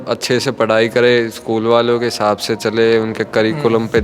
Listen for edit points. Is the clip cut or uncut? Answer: uncut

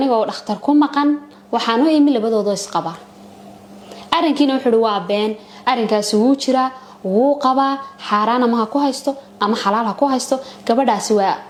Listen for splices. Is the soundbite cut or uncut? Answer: uncut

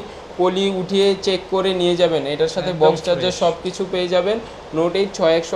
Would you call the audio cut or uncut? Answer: uncut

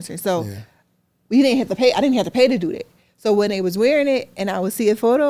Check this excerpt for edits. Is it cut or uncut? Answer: uncut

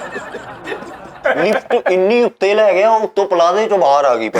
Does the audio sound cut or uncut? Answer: cut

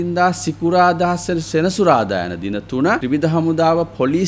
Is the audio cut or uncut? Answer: cut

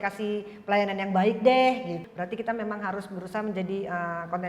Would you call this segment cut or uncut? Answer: cut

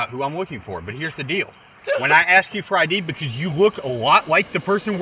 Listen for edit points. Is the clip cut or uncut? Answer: uncut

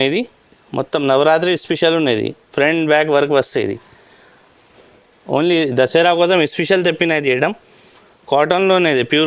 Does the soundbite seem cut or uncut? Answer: uncut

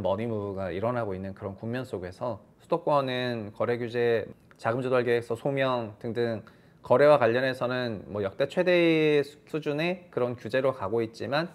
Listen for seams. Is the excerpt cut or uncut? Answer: uncut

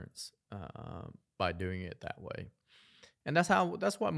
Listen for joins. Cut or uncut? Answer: uncut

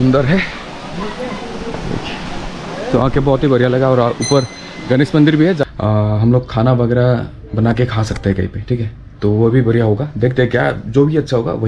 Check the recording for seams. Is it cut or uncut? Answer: cut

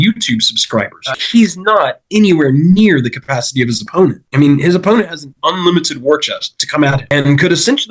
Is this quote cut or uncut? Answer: cut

